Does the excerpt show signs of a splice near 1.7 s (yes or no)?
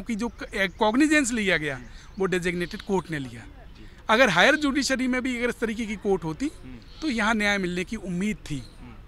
no